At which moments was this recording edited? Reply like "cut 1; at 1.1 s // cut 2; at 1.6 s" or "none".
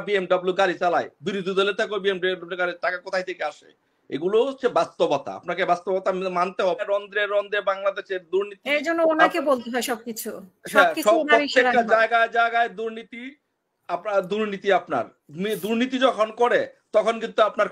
cut 1; at 6.8 s